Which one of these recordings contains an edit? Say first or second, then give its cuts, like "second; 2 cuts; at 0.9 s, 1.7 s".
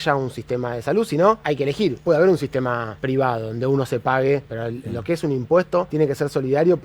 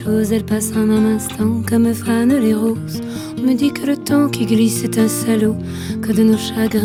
first; 4 cuts; at 1.9 s, 2.9 s, 4.5 s, 5.9 s